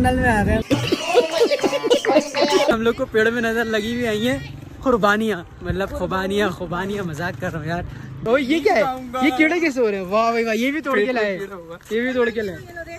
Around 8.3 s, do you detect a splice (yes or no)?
yes